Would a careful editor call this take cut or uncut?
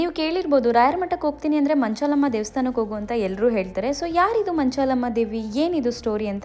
uncut